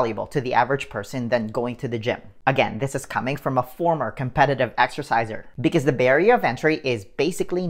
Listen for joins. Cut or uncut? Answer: uncut